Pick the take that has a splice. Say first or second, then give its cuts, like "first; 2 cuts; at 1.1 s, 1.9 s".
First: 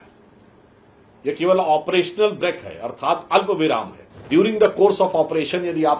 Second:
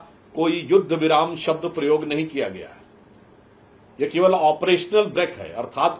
first; 1 cut; at 4.3 s